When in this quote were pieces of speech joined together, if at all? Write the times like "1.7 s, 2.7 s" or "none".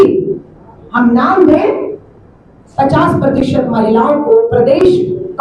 none